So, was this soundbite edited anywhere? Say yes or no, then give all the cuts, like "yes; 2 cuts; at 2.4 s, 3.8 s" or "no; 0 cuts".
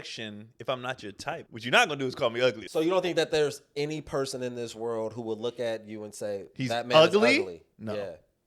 yes; 2 cuts; at 1.4 s, 2.6 s